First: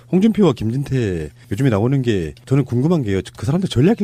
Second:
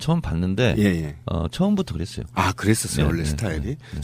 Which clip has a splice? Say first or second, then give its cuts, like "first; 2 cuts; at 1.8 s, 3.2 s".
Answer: second; 1 cut; at 2.6 s